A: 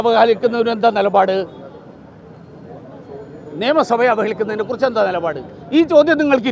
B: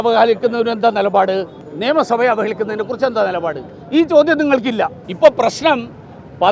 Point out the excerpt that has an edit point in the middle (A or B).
B